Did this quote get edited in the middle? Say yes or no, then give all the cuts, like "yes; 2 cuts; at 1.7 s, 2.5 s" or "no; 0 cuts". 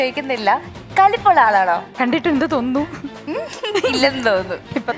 yes; 2 cuts; at 1.9 s, 3.2 s